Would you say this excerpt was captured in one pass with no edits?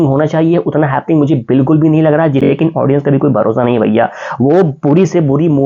no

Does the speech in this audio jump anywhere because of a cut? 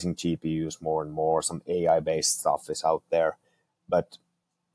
no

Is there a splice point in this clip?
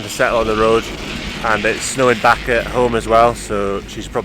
no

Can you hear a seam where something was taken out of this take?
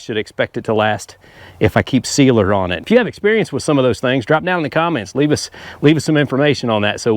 yes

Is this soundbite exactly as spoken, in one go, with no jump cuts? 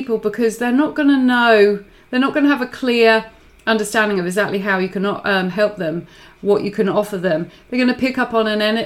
yes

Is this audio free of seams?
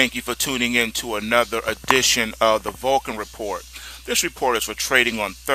yes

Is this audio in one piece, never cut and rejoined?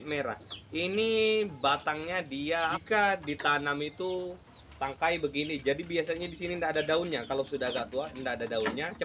no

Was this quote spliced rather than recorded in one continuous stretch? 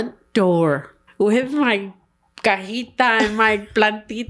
yes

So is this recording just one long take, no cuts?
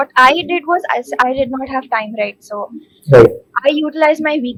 yes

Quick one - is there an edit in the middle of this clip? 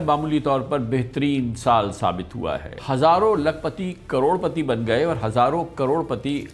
yes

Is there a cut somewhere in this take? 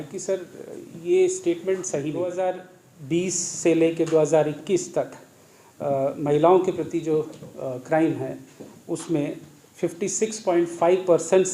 yes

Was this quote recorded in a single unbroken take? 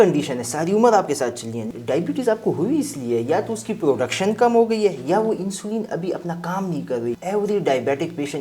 no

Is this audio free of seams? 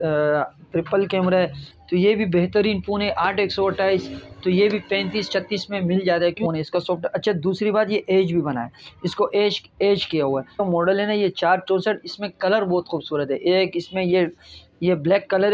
no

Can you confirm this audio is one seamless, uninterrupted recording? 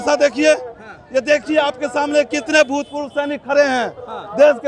yes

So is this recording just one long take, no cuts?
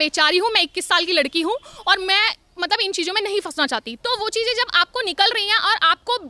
no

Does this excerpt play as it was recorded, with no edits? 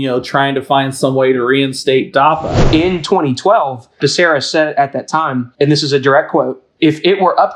no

